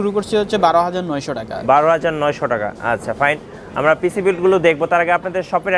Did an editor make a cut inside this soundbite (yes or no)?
no